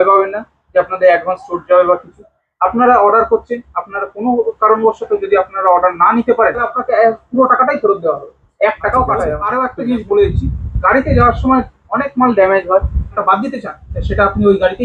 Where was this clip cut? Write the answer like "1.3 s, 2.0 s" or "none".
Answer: 6.7 s, 9.4 s, 13.2 s